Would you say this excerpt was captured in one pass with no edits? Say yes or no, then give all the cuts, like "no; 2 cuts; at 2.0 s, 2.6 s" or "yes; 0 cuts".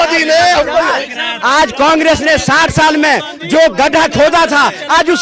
no; 1 cut; at 1.1 s